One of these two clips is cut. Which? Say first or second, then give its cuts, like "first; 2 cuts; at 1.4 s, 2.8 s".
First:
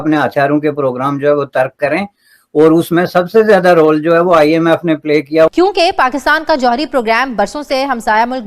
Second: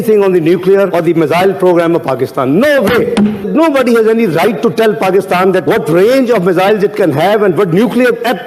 first; 1 cut; at 5.5 s